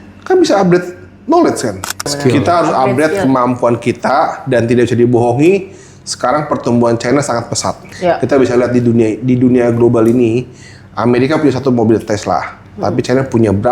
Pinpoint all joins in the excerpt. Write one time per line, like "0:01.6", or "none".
0:02.1